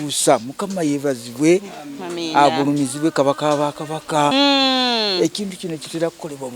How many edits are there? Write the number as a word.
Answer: one